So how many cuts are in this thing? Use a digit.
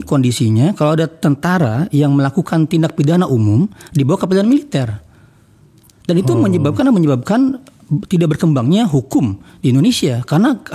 0